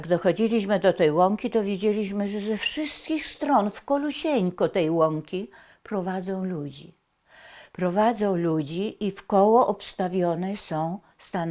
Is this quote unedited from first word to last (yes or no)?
yes